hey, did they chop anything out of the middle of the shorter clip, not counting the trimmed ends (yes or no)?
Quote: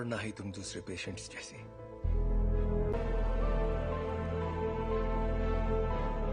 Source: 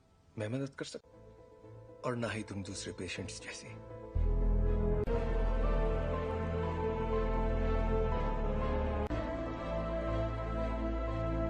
yes